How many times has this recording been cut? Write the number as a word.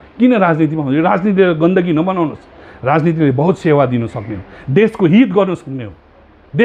zero